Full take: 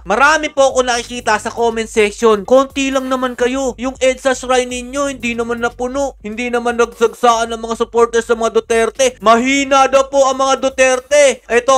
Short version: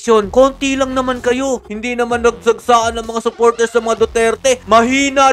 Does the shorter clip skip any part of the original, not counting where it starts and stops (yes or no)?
yes